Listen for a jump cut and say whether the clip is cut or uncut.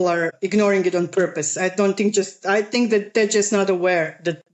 uncut